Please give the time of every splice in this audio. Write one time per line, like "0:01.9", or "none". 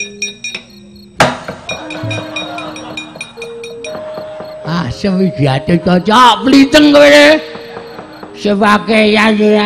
0:03.9